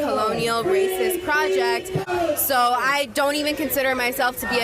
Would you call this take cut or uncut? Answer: cut